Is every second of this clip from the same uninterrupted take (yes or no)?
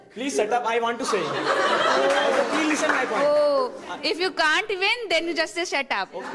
yes